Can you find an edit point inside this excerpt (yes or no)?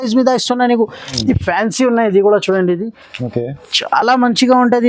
yes